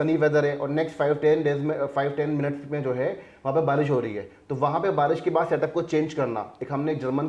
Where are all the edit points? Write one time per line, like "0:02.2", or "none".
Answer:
none